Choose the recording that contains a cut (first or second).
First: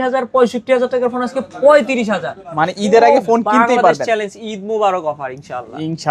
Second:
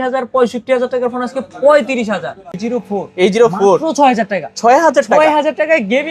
second